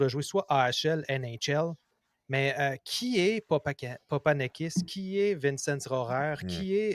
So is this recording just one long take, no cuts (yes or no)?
yes